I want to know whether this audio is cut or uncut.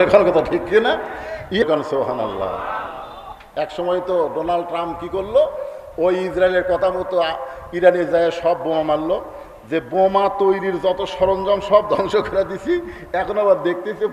cut